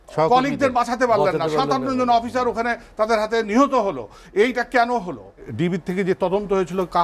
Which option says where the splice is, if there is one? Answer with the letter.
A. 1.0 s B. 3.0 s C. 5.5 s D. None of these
C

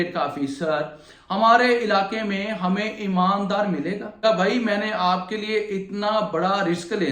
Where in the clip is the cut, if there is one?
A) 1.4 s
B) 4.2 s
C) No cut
B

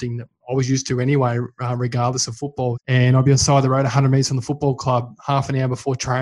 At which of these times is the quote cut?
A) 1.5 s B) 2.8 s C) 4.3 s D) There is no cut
B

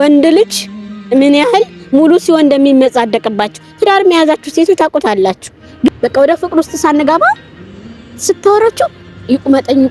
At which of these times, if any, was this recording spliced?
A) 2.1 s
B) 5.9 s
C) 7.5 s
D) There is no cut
B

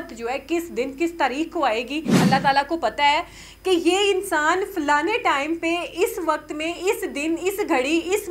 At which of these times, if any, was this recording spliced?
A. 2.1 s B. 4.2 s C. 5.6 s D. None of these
A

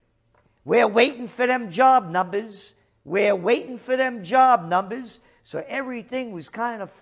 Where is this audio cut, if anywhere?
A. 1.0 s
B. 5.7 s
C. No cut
B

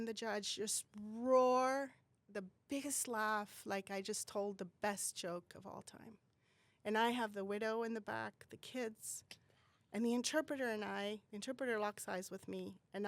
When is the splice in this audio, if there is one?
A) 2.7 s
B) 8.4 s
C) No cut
C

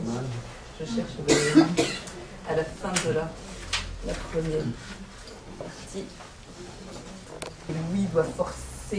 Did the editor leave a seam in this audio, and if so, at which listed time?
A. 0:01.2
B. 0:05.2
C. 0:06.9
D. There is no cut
D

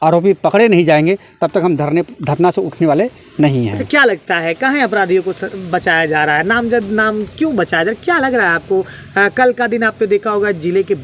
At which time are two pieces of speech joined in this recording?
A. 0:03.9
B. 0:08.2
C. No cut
C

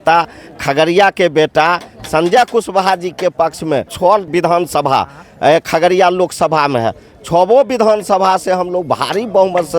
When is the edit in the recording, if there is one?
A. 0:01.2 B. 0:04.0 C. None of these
B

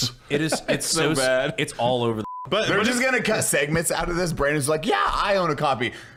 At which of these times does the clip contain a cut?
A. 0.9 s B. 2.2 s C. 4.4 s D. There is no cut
D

